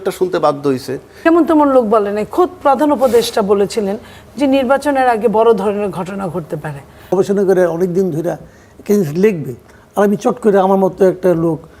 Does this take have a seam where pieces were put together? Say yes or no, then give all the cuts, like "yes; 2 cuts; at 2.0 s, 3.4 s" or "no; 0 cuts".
yes; 2 cuts; at 1.1 s, 7.1 s